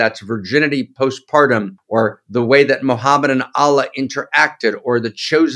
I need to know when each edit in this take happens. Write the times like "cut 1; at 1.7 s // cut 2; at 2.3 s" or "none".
cut 1; at 1.8 s